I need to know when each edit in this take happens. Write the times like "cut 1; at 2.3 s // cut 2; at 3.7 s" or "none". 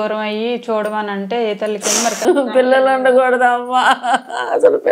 cut 1; at 2.2 s